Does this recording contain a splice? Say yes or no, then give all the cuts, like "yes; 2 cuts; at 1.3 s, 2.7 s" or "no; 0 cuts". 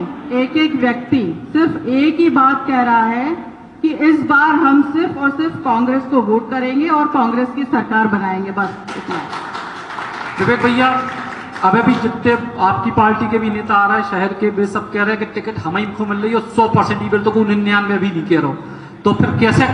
no; 0 cuts